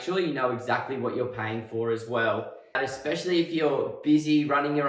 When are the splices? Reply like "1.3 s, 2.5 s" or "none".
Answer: 2.8 s